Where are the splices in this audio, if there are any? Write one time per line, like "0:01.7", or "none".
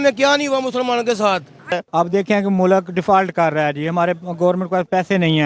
0:01.7